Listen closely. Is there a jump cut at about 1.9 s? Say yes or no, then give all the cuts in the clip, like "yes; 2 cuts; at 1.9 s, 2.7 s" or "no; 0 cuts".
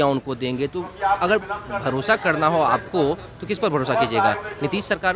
no; 0 cuts